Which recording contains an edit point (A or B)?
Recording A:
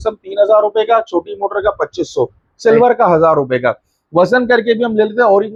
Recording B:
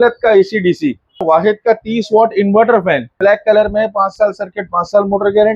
B